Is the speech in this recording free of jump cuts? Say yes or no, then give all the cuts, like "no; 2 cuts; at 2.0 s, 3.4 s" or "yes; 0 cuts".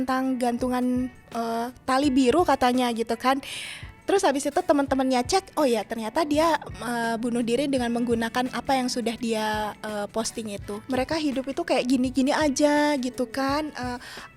no; 1 cut; at 10.7 s